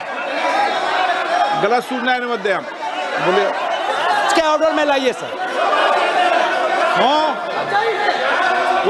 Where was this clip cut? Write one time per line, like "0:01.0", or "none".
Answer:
none